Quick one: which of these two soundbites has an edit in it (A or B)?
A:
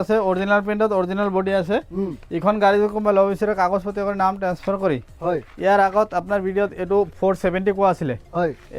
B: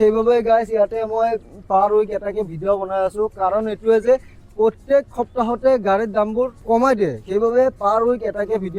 B